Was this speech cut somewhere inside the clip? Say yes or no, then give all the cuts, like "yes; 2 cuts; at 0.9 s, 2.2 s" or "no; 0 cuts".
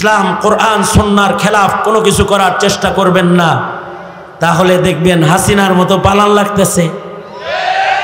no; 0 cuts